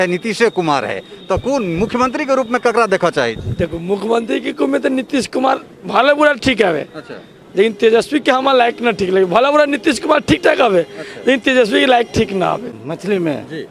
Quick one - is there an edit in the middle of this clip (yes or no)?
yes